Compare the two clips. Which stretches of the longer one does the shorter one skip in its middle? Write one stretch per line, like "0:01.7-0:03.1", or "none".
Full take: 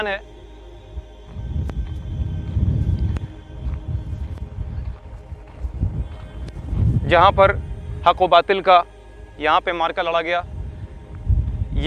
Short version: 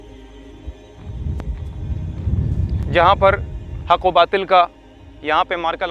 0:03.2-0:07.0